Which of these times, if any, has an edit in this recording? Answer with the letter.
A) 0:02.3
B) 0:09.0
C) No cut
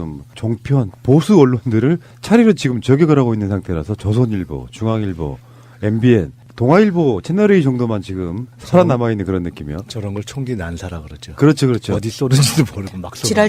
A